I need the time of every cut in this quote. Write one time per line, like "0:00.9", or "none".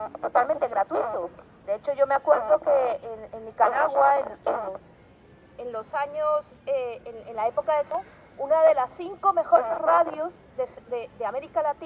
none